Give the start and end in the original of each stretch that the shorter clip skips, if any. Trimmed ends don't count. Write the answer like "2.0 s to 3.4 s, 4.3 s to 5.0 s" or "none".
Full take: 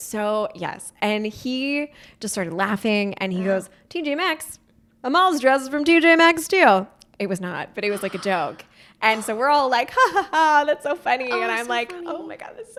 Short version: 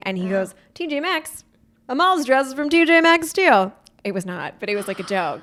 none